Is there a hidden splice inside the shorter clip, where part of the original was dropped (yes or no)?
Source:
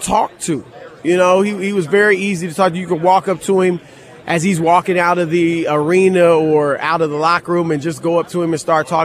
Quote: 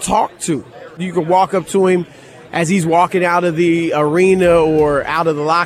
yes